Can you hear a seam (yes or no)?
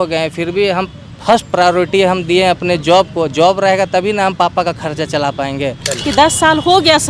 yes